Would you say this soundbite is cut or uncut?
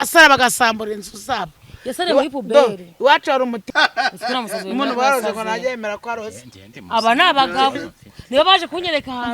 cut